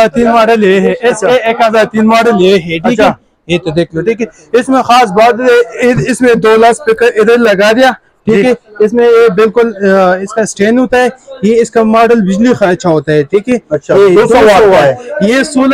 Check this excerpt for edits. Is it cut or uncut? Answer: uncut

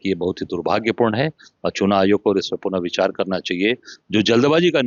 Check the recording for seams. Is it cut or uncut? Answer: uncut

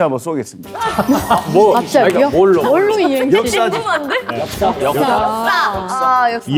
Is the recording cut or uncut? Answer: uncut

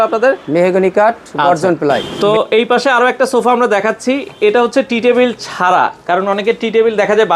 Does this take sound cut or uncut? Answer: cut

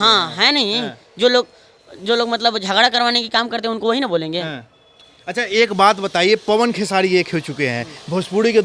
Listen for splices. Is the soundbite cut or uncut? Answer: uncut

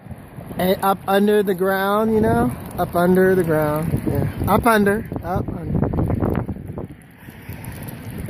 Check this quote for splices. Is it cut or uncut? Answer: uncut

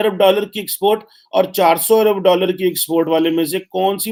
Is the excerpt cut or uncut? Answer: uncut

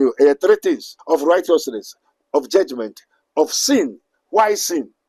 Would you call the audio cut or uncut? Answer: cut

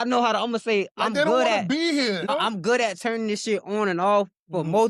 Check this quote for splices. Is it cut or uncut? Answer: cut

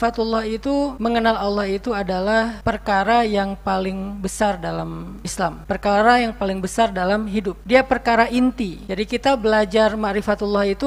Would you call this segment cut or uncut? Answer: uncut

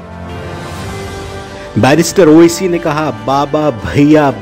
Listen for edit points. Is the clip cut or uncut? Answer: cut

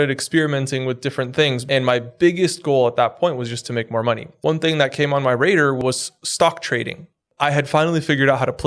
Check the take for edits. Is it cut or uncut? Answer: cut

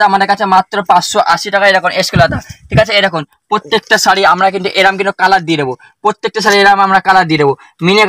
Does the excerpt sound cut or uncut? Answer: uncut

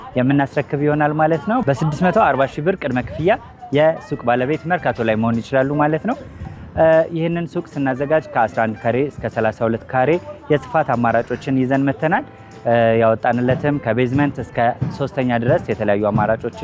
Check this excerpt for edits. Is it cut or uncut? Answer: uncut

